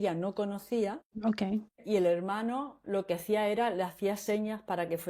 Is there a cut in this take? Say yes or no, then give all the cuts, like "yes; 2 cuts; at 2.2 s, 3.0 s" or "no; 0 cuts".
yes; 1 cut; at 1.2 s